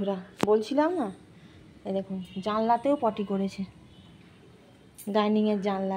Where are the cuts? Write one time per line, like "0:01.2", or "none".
none